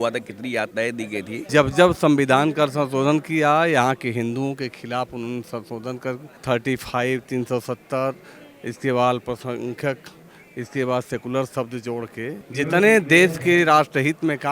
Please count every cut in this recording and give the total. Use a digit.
2